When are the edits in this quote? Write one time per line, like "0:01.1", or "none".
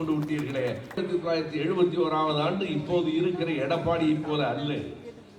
0:01.0

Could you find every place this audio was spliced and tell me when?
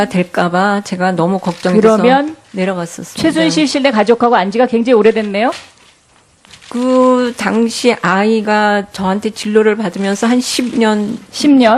none

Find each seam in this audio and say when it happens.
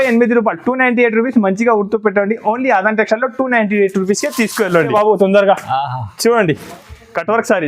0:04.9

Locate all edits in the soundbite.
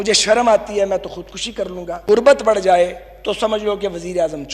0:02.2

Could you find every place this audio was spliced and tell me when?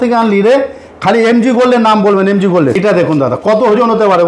0:02.8

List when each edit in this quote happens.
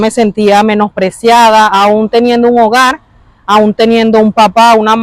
none

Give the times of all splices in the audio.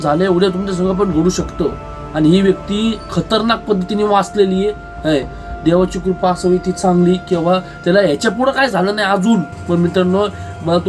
0:09.5

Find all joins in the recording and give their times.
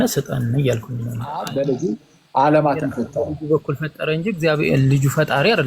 0:01.4

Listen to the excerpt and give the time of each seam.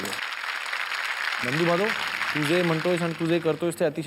0:01.4

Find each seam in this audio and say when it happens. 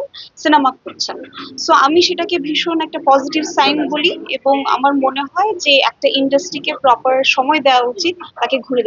none

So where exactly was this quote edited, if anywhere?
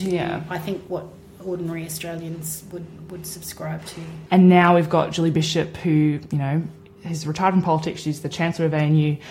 0:04.1

